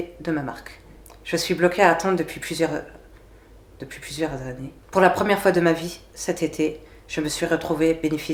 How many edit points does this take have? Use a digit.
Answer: 0